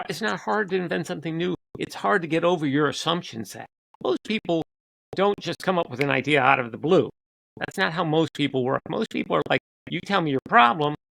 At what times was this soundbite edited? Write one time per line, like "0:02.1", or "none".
0:03.8